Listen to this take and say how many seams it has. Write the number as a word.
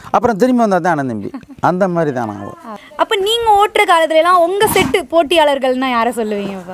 zero